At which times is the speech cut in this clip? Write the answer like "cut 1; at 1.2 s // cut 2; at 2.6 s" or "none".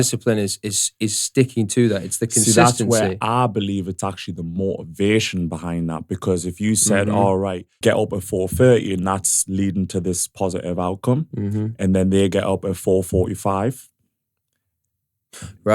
cut 1; at 7.7 s